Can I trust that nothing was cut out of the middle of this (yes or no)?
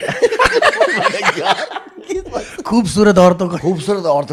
yes